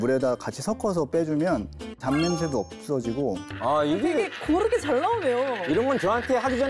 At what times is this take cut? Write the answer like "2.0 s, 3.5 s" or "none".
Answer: 1.8 s, 3.4 s